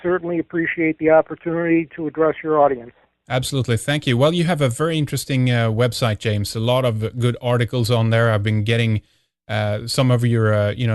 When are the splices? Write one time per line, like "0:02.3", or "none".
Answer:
0:02.0

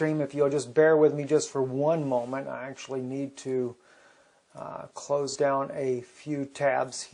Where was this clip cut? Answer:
none

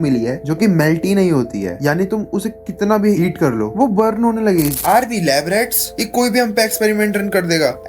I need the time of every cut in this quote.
0:04.8

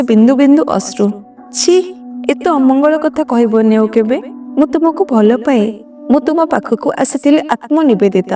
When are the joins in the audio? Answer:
0:02.0

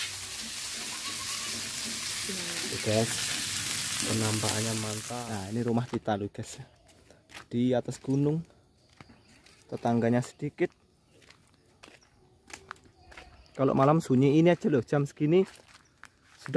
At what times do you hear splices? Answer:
0:05.0

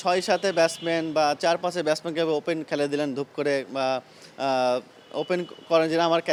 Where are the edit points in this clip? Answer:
none

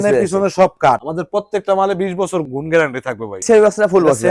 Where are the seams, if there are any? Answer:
0:01.0
0:02.5
0:03.4

